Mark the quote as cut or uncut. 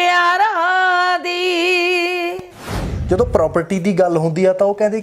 cut